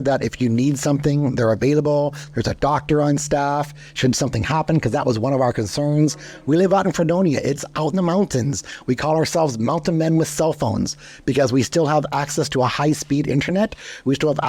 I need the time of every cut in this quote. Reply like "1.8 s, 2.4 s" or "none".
none